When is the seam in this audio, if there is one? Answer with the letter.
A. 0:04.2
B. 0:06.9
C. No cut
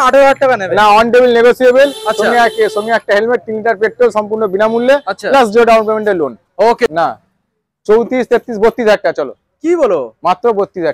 B